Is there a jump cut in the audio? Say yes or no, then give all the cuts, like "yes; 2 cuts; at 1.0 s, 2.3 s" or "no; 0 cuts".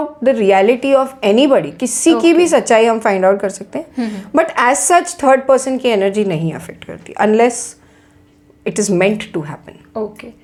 no; 0 cuts